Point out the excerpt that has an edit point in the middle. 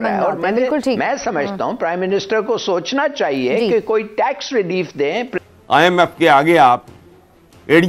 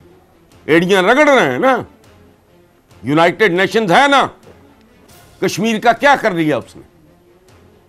first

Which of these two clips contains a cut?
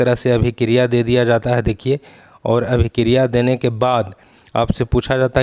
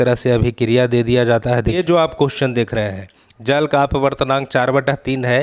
second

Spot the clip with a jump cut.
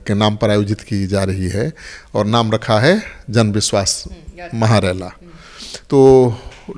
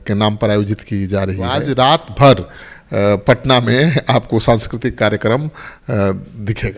second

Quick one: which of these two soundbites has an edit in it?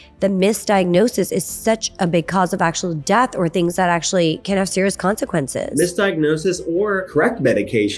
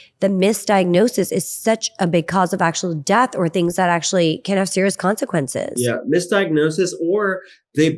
first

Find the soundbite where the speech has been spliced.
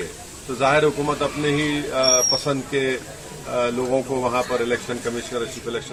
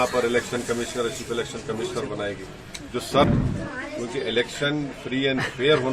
second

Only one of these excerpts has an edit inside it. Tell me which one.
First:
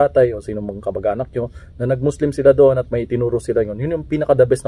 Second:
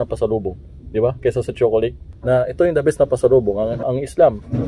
second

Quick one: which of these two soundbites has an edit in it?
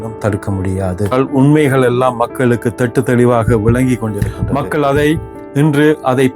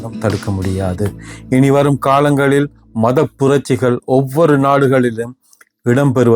first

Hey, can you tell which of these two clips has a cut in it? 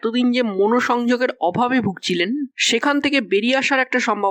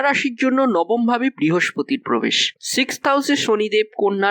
second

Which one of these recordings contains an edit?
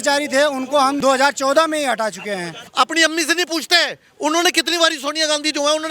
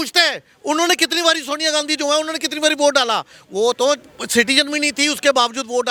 first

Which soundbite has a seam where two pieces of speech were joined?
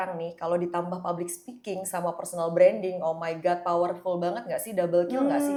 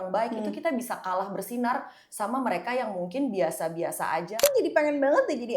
second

